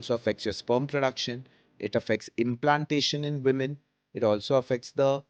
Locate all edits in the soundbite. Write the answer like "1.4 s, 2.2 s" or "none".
none